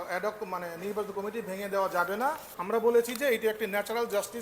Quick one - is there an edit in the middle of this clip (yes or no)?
yes